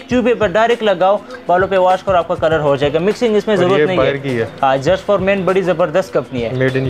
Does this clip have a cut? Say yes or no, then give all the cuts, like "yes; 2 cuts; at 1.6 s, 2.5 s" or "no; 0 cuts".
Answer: no; 0 cuts